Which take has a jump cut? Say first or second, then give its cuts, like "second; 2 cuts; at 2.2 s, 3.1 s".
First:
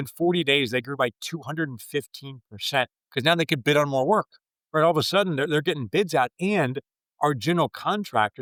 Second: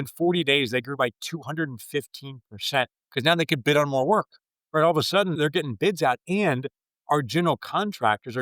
second; 1 cut; at 5.4 s